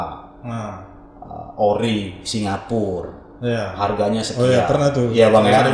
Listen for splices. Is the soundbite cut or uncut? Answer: uncut